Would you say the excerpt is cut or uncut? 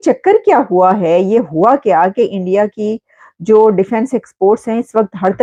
uncut